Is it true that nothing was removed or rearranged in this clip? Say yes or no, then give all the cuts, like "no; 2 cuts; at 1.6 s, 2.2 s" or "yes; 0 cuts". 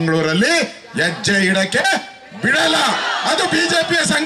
yes; 0 cuts